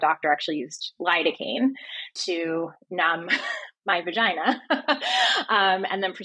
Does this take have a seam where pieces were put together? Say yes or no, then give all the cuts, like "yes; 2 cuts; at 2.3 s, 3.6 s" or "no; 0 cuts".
yes; 1 cut; at 2.1 s